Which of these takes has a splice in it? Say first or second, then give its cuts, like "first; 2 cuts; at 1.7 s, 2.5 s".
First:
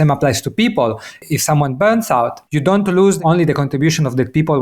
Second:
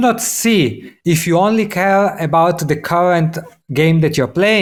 first; 2 cuts; at 2.4 s, 3.2 s